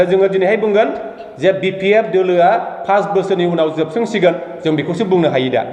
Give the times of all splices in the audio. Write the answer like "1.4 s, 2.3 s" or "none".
none